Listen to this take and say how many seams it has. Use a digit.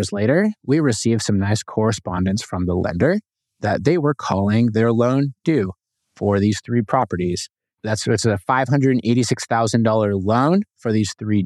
1